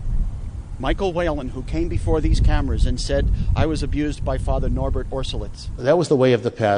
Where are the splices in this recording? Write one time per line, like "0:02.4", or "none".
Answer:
0:05.8

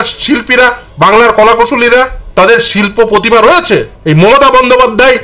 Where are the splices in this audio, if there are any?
0:02.2
0:03.9

